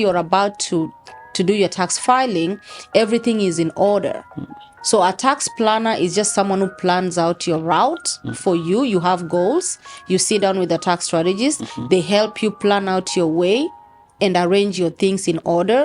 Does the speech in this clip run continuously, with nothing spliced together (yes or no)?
yes